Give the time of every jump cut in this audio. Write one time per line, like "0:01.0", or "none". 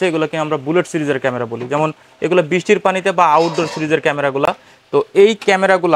none